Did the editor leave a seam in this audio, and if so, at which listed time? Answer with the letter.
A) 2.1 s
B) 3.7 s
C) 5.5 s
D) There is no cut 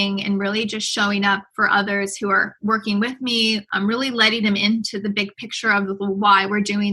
B